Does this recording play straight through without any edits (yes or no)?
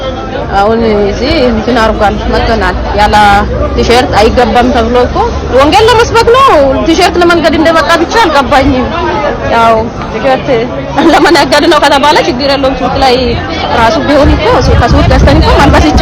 yes